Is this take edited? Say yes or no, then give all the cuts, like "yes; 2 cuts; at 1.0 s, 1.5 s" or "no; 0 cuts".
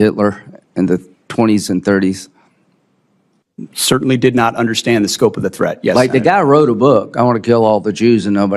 no; 0 cuts